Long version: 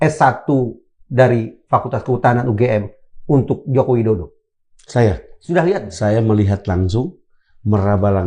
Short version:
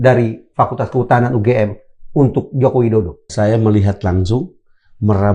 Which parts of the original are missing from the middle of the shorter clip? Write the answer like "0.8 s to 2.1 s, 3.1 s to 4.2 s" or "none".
4.4 s to 5.9 s